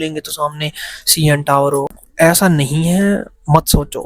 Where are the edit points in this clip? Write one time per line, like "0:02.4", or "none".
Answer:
0:02.0